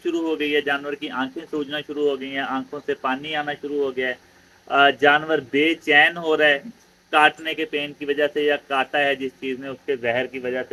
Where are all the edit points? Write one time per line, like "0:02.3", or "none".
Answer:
none